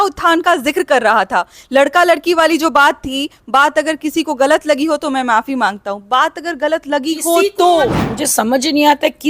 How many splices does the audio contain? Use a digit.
1